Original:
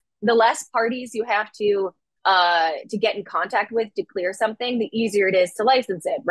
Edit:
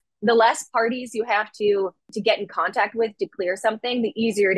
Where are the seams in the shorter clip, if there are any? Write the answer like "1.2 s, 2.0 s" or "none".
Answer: 2.1 s